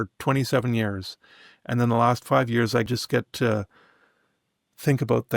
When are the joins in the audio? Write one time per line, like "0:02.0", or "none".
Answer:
0:02.9